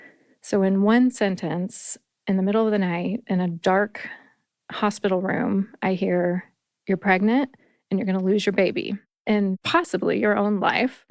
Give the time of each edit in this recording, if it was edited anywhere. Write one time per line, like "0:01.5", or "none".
0:09.5